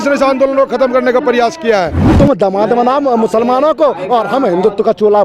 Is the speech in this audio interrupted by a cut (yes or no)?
yes